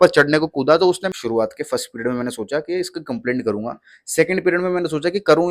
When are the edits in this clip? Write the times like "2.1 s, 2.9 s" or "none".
1.1 s

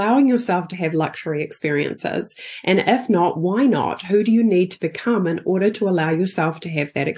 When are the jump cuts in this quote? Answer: none

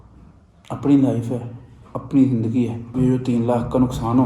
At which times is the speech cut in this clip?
2.9 s

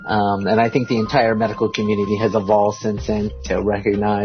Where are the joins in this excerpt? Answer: 3.3 s

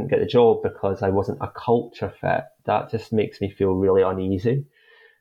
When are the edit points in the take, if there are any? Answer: none

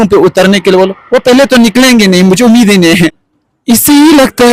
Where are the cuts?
3.2 s

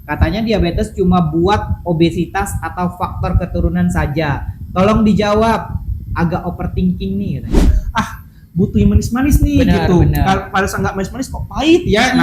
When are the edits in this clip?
7.7 s

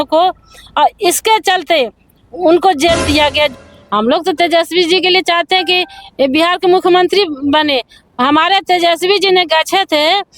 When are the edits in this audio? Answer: 3.6 s

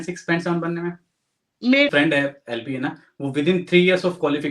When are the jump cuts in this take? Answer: 1.9 s

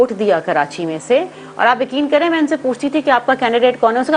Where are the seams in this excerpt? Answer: none

